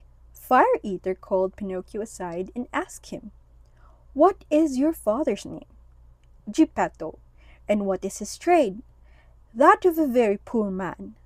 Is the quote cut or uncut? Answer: uncut